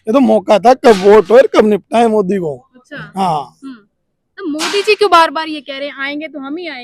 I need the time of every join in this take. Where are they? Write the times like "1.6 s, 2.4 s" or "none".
none